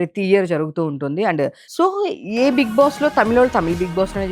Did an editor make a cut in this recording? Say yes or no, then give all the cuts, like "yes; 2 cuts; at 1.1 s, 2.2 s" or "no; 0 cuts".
yes; 1 cut; at 1.6 s